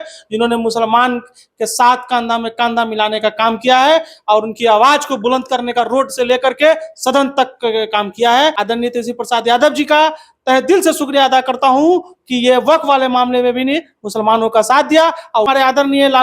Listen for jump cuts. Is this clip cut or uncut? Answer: cut